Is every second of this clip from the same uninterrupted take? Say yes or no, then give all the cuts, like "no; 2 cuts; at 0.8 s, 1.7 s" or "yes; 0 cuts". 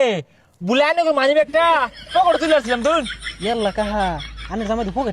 no; 1 cut; at 3.2 s